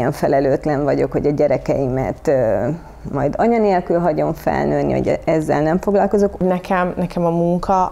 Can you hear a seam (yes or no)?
yes